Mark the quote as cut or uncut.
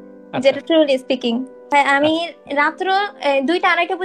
cut